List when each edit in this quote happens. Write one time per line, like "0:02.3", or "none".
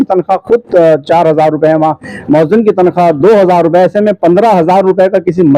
none